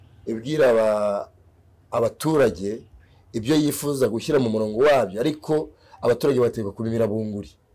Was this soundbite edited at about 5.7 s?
no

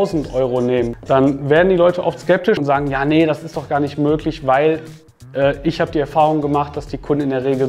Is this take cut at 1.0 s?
yes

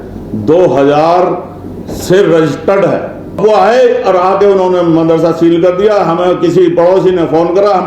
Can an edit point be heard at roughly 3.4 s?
yes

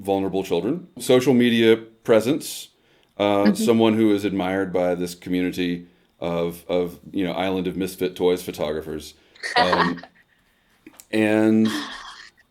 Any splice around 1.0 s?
yes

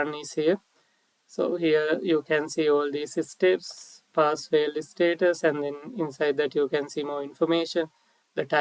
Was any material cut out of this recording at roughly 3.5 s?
no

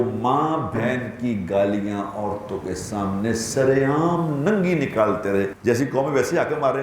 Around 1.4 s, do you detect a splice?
no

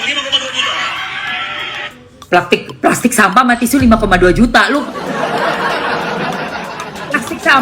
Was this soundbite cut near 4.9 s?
no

